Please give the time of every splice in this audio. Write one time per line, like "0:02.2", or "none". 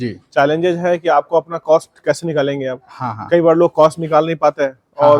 none